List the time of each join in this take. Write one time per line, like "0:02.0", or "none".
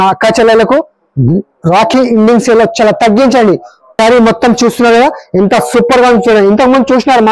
0:03.9